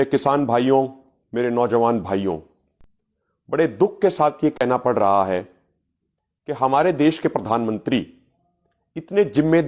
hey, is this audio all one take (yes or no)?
yes